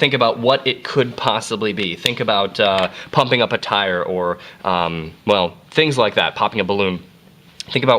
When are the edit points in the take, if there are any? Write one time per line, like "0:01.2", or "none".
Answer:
0:03.9